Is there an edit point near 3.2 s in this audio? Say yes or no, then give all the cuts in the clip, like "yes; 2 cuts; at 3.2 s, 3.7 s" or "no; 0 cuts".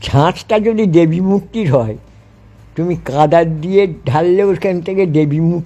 no; 0 cuts